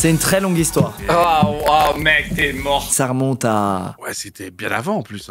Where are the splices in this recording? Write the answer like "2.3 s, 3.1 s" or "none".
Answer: 2.9 s, 4.0 s